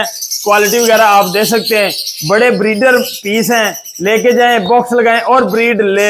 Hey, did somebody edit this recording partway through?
no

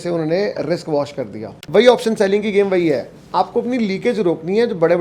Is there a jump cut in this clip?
yes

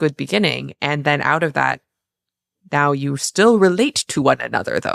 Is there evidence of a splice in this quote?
no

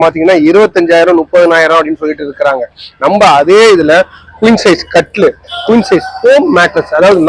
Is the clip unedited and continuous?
yes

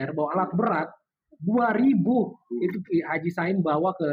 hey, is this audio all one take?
yes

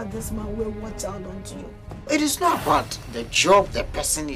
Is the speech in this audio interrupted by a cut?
no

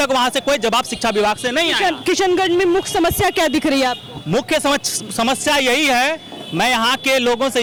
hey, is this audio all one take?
yes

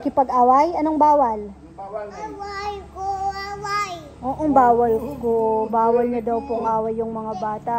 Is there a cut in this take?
no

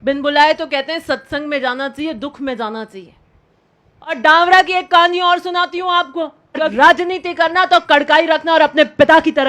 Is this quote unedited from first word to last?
no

